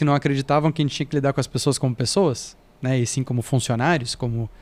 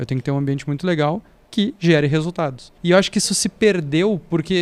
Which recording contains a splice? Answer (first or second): second